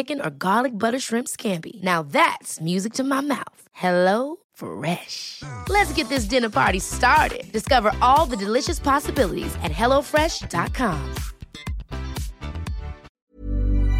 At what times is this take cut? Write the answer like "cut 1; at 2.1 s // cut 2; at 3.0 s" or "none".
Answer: cut 1; at 13.1 s